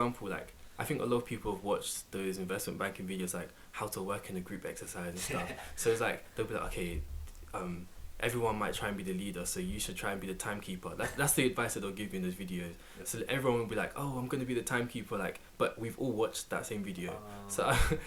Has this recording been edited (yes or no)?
no